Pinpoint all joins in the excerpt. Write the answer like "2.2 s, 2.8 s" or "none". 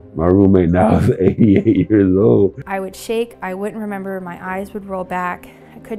2.6 s